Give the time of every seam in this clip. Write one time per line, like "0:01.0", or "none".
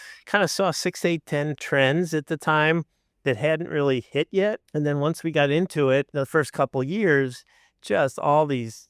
0:01.6
0:04.6
0:06.1